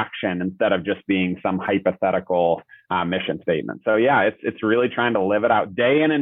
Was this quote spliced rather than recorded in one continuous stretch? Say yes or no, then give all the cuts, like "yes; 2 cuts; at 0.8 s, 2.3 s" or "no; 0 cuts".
no; 0 cuts